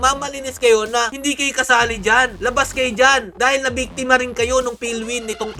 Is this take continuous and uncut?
yes; 0 cuts

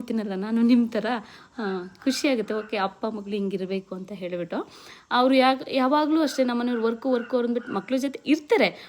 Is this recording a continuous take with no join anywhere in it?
yes; 0 cuts

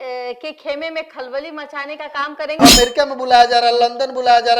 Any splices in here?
yes; 1 cut; at 2.6 s

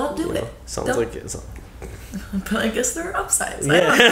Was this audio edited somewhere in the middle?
no; 0 cuts

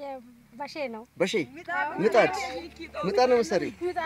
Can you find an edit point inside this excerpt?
no; 0 cuts

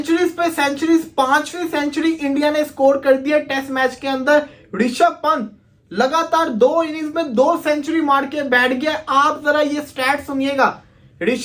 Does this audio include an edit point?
no; 0 cuts

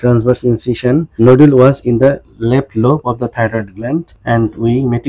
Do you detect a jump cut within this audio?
yes; 2 cuts; at 1.1 s, 4.1 s

